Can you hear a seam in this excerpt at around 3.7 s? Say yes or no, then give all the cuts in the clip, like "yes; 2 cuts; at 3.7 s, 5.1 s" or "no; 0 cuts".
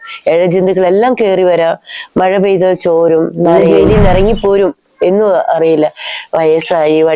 yes; 1 cut; at 3.7 s